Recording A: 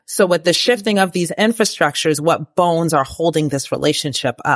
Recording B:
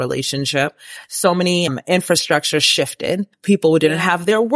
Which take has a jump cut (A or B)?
B